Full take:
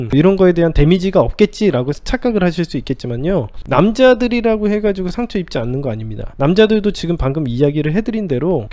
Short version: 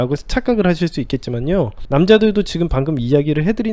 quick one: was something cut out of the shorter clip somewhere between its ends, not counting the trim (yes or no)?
yes